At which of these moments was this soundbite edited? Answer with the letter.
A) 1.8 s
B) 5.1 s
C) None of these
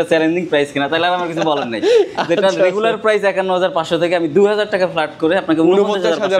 C